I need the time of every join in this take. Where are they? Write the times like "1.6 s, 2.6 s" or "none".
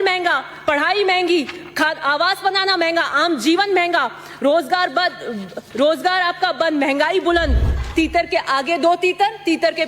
7.8 s